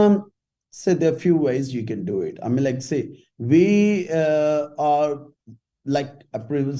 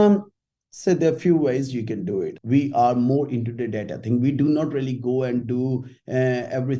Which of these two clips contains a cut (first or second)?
second